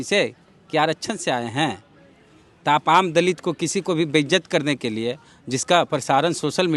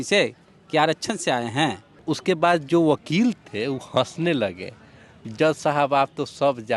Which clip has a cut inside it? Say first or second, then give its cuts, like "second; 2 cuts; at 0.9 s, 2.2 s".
second; 1 cut; at 2.1 s